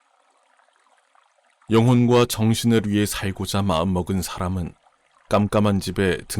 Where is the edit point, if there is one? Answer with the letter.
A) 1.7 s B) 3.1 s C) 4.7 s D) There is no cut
A